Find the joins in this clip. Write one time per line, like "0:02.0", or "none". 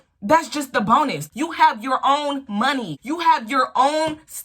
0:01.2
0:02.9